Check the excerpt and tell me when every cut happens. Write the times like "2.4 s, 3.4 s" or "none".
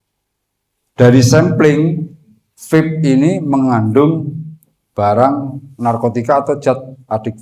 none